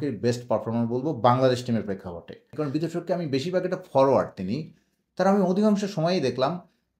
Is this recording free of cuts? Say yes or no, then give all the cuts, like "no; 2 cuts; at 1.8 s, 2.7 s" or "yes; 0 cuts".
no; 1 cut; at 2.5 s